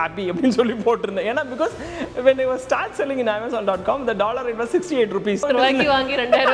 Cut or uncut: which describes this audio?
cut